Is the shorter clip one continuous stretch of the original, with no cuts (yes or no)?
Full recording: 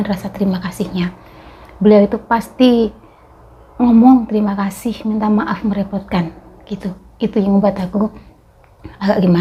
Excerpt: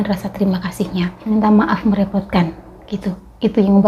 no